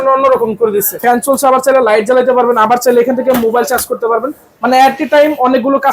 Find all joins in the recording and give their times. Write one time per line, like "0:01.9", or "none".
0:01.0